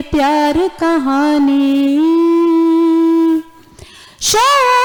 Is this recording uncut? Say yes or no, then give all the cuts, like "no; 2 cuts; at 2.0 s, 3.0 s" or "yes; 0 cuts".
yes; 0 cuts